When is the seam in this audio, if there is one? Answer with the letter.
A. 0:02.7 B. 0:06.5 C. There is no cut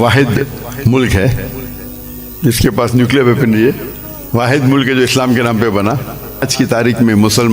B